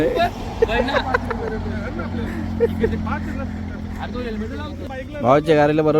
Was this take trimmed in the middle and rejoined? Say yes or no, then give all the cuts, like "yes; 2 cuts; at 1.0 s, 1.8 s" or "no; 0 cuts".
yes; 1 cut; at 4.9 s